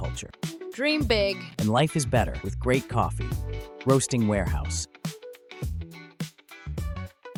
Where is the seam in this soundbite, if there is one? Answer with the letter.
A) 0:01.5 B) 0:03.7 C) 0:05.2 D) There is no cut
D